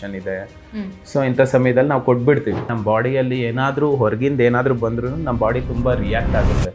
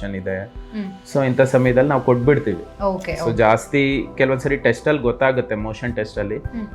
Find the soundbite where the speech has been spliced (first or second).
first